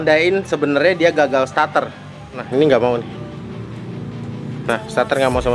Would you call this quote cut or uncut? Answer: cut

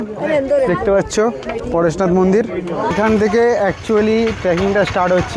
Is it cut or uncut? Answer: cut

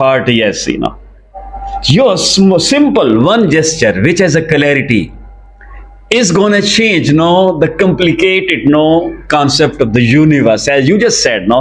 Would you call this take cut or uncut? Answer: uncut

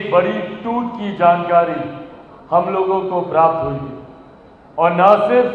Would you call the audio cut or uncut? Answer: uncut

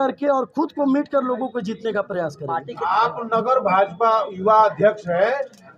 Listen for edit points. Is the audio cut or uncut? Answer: cut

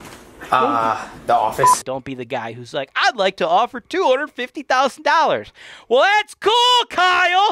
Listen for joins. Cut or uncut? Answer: cut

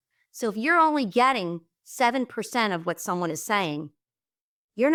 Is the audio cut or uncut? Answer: uncut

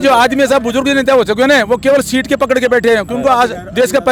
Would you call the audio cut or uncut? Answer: uncut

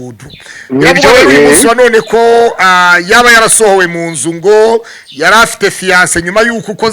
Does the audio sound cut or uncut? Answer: uncut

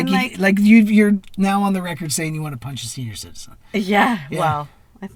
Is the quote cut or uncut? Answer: uncut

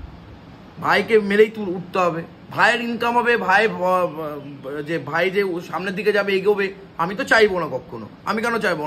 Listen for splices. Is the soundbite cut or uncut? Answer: uncut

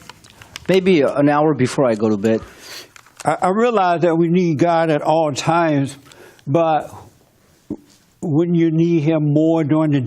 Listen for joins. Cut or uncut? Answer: cut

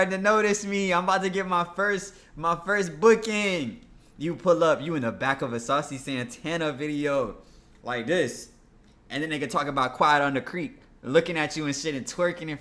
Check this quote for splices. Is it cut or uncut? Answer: uncut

